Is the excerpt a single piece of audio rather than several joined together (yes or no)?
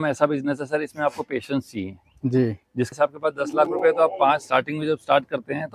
no